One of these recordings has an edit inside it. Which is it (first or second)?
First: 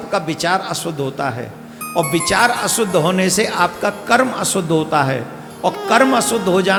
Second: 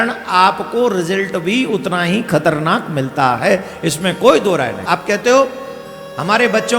second